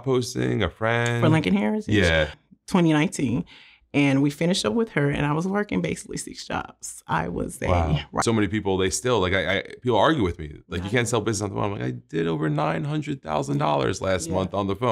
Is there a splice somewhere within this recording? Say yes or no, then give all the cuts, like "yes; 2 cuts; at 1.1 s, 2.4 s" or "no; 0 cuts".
yes; 2 cuts; at 2.4 s, 8.2 s